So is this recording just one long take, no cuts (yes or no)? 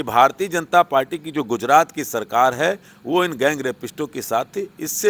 yes